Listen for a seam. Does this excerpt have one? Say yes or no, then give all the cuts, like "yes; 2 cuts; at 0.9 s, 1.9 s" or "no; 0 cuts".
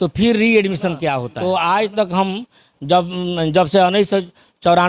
yes; 1 cut; at 1.3 s